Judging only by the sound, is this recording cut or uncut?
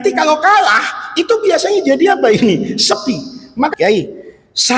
cut